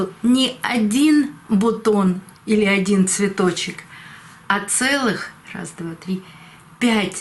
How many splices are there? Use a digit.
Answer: 0